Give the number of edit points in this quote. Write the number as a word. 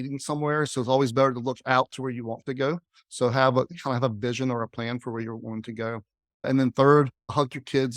one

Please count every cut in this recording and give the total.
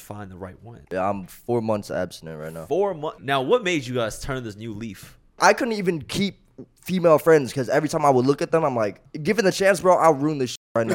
four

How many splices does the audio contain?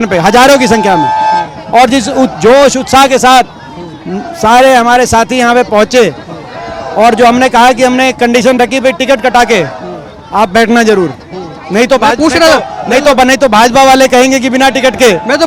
zero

